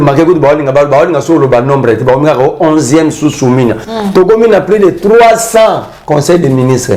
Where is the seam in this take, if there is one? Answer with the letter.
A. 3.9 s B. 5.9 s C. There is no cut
A